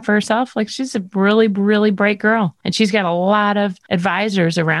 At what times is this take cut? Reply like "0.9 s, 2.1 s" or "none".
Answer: 2.6 s, 3.8 s